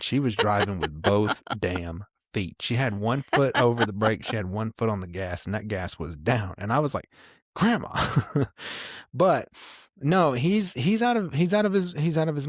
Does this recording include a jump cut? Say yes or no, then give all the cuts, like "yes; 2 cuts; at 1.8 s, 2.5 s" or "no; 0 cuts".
no; 0 cuts